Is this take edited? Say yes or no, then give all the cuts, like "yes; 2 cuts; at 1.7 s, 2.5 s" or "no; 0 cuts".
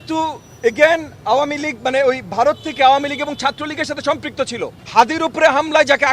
yes; 1 cut; at 4.8 s